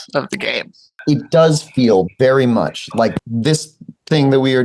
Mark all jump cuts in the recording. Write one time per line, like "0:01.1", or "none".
0:03.2